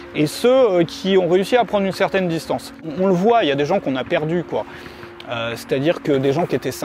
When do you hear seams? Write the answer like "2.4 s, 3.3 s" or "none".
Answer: 2.8 s